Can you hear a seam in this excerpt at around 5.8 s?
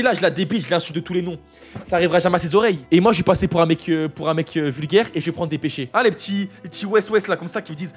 yes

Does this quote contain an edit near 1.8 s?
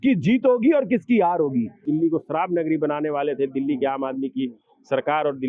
yes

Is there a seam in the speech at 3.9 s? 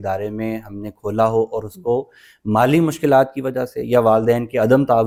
no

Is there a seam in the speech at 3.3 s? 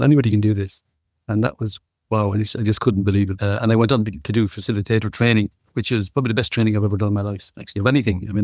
yes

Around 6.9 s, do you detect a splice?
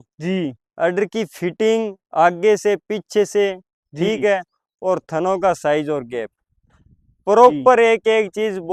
no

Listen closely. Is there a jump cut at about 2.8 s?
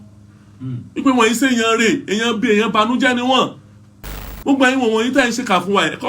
no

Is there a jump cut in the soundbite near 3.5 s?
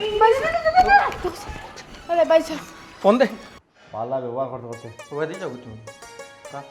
yes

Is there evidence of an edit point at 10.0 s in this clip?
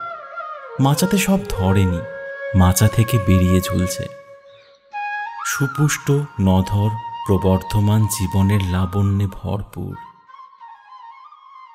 yes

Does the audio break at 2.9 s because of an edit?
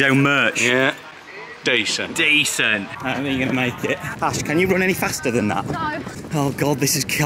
yes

